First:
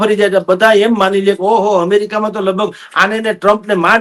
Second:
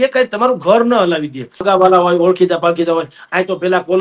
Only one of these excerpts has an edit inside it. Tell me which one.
second; 1 cut; at 1.6 s

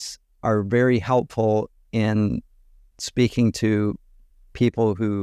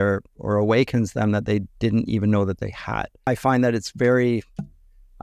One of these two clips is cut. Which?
second; 1 cut; at 3.1 s

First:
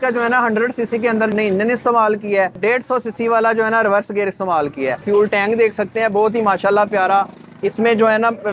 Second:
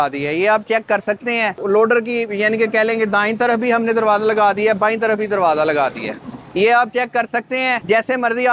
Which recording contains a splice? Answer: first; 2 cuts; at 2.5 s, 5.0 s

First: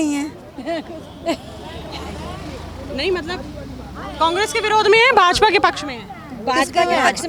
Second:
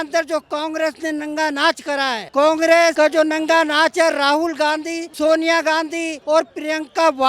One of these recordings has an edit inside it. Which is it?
second; 4 cuts; at 2.2 s, 2.9 s, 5.0 s, 6.1 s

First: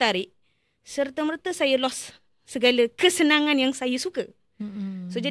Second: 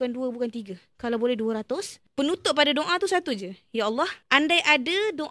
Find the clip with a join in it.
second; 2 cuts; at 2.0 s, 4.2 s

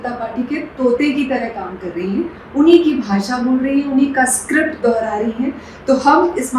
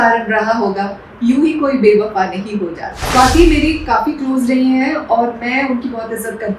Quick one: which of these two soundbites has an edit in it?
second; 1 cut; at 3.0 s

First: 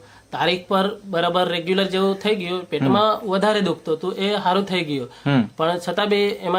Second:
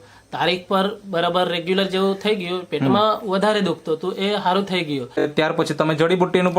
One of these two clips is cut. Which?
second; 1 cut; at 5.3 s

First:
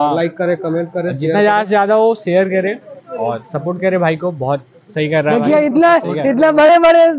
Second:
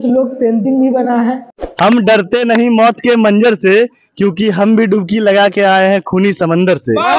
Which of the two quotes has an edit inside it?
second; 1 cut; at 1.5 s

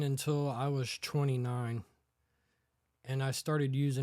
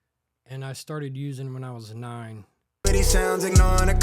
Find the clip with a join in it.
second; 1 cut; at 2.8 s

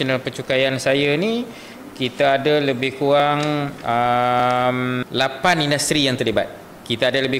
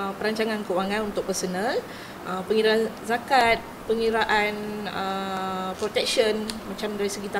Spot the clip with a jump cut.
first; 1 cut; at 5.0 s

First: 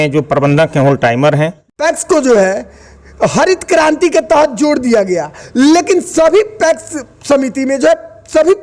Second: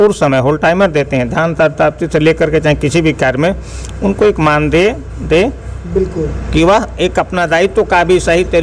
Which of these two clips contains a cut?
first; 1 cut; at 1.7 s

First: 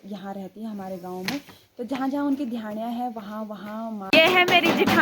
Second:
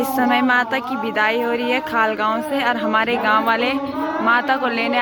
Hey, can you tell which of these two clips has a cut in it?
first; 1 cut; at 4.1 s

